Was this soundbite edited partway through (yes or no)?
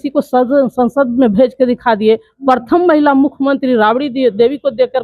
no